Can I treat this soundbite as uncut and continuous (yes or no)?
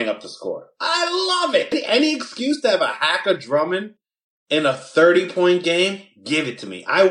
no